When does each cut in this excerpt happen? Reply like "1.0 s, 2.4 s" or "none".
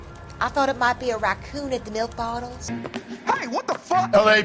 2.6 s

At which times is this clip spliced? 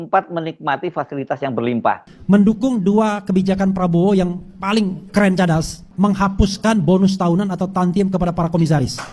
2.1 s, 5.8 s

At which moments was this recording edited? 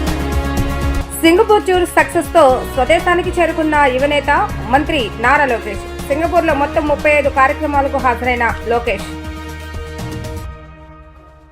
0.9 s

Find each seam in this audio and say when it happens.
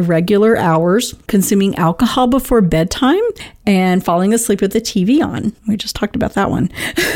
1.2 s, 3.5 s, 5.6 s

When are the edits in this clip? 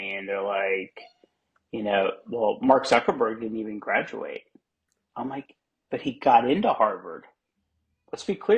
none

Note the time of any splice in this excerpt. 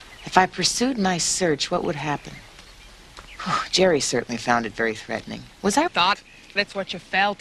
none

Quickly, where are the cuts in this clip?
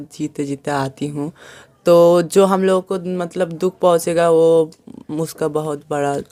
none

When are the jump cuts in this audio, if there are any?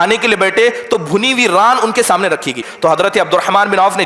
2.7 s

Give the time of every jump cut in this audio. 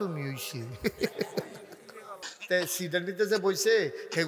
2.3 s

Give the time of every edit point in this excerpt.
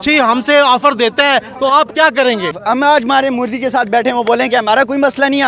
2.6 s

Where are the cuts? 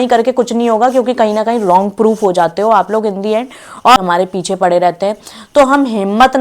4.0 s

